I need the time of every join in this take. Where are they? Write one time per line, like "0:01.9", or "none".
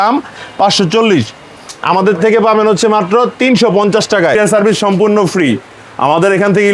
0:04.4